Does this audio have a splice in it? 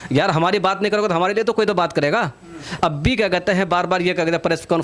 no; 0 cuts

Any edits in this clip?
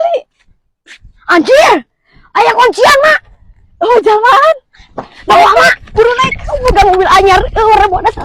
no; 0 cuts

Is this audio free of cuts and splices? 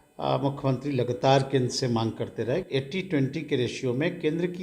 no; 1 cut; at 2.7 s

